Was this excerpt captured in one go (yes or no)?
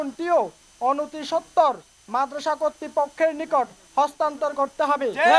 yes